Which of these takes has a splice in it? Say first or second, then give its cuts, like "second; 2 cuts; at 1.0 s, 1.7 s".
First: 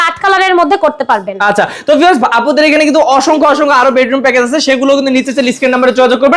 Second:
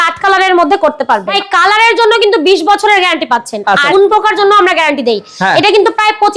second; 2 cuts; at 1.3 s, 3.9 s